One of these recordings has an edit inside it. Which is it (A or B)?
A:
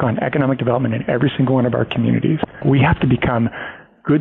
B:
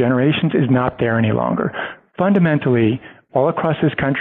A